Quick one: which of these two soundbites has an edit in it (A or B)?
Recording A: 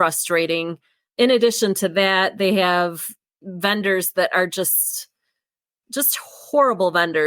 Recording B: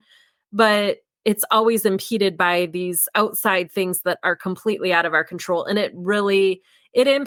A